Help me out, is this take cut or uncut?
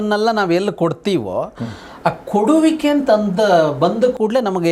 uncut